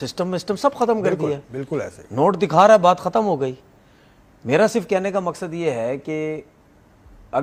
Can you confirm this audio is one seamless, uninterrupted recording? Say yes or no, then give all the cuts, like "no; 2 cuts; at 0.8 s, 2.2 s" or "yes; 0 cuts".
yes; 0 cuts